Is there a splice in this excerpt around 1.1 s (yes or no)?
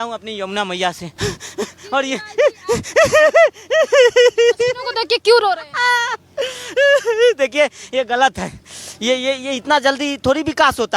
yes